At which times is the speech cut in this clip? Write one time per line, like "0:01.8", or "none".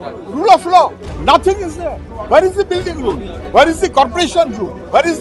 0:01.1
0:02.1
0:03.3